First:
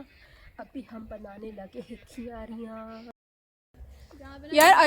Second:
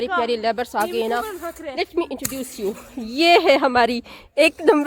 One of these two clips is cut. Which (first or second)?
first